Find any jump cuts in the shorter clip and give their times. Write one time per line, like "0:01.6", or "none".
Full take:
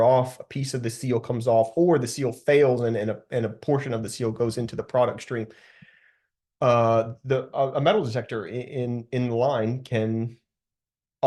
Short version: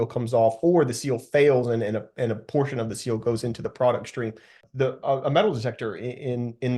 0:04.7